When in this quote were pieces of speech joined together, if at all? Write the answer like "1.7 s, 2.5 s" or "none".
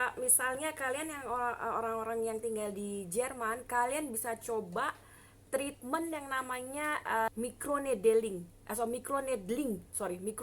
7.3 s